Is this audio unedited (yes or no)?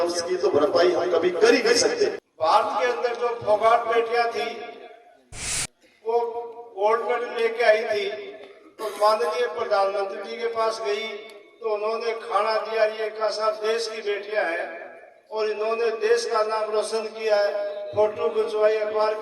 no